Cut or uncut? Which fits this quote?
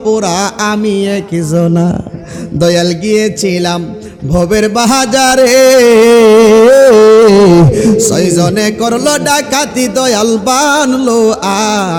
uncut